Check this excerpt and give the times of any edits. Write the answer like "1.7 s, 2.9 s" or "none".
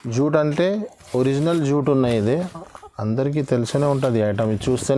none